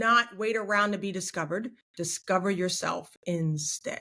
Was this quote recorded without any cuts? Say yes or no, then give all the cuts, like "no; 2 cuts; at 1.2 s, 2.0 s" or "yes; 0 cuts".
yes; 0 cuts